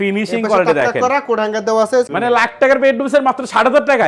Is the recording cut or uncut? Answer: cut